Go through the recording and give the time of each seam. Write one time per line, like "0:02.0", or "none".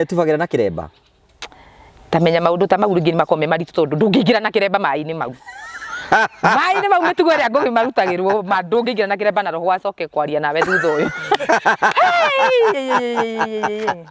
none